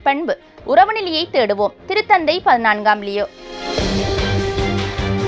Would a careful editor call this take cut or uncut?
cut